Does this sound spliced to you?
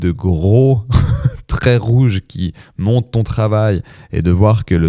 no; 0 cuts

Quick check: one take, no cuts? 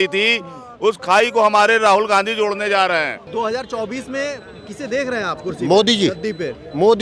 no; 1 cut; at 3.2 s

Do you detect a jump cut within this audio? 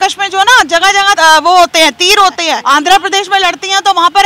yes; 2 cuts; at 1.2 s, 2.5 s

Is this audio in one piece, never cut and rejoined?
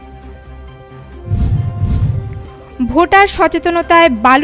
no; 1 cut; at 2.1 s

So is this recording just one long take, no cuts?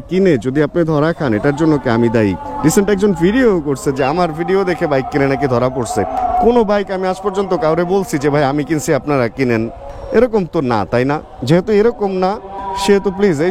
yes; 0 cuts

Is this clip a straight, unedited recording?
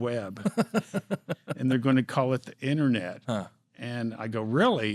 yes; 0 cuts

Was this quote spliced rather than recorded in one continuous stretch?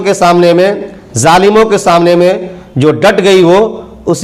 no; 0 cuts

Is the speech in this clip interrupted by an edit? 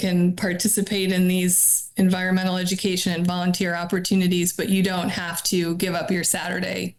no; 0 cuts

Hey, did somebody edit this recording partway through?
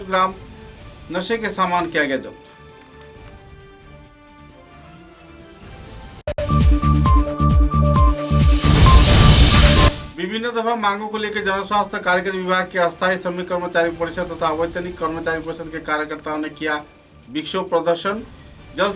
yes; 2 cuts; at 6.3 s, 9.9 s

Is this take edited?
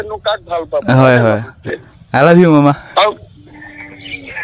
yes; 1 cut; at 1.6 s

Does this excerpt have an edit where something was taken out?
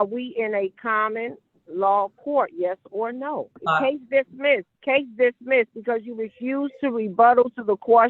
yes; 2 cuts; at 3.6 s, 4.7 s

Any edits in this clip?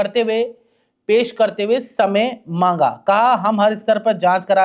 no; 0 cuts

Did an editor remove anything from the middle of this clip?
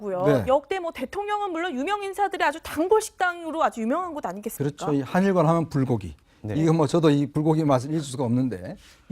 yes; 1 cut; at 1.7 s

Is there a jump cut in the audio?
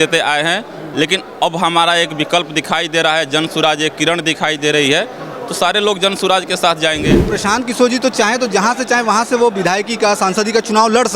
yes; 1 cut; at 7.3 s

